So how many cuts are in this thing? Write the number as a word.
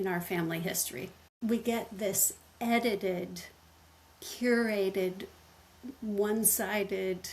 one